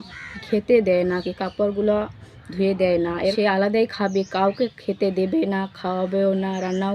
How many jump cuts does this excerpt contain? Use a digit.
1